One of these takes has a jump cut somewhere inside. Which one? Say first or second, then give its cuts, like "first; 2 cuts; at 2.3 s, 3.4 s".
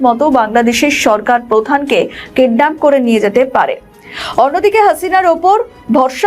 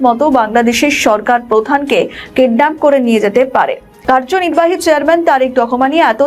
second; 1 cut; at 3.9 s